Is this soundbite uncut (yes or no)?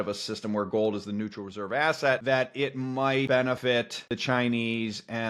no